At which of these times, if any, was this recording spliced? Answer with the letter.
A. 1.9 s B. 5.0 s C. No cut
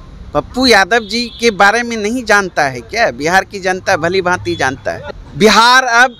B